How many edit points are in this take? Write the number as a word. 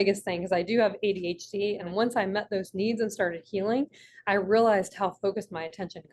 one